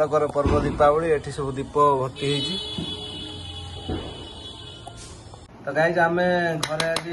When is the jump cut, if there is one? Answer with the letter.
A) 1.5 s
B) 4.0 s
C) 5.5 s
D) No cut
C